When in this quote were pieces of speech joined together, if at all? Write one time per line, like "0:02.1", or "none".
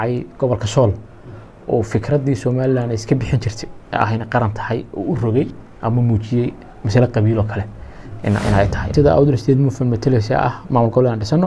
0:08.9